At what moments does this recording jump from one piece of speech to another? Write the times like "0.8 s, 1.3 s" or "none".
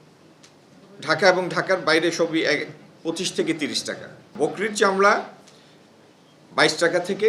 4.3 s